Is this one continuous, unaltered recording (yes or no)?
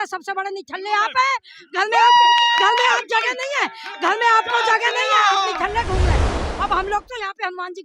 no